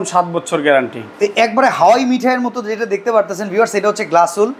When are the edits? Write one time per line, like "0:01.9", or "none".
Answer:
0:01.0